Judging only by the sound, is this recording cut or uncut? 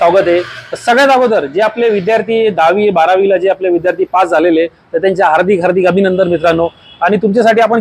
uncut